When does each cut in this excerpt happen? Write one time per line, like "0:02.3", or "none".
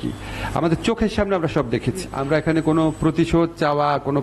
0:02.1